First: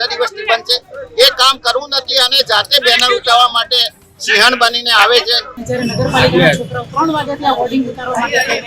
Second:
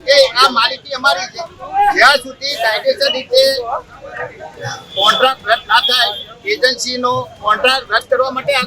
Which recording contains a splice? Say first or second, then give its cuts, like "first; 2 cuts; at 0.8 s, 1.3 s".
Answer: first; 1 cut; at 5.5 s